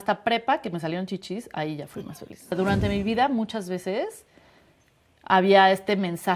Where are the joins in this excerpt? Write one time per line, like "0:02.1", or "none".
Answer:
0:02.4